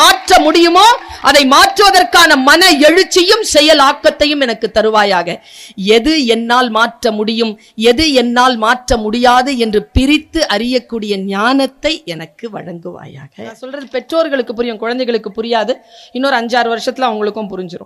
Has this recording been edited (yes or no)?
yes